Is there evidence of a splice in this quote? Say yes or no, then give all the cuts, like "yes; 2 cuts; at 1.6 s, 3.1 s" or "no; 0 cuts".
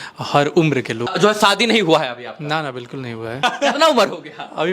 yes; 2 cuts; at 1.1 s, 3.4 s